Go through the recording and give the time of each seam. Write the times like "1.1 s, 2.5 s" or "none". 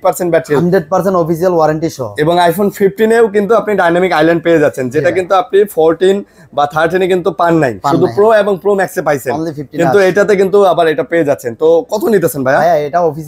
none

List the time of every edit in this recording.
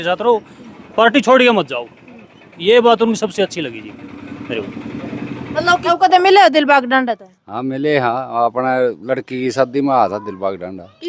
5.7 s

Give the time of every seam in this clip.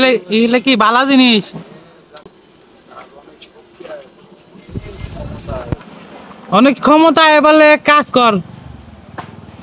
2.2 s

